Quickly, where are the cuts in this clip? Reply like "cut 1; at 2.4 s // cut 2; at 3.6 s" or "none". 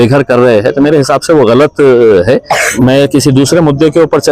cut 1; at 2.6 s